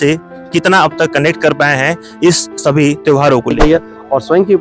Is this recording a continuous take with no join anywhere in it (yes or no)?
no